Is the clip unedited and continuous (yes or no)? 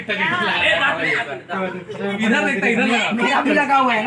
yes